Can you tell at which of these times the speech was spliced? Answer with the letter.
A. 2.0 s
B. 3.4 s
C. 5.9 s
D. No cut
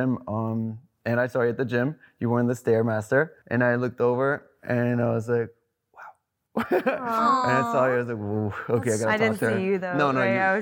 B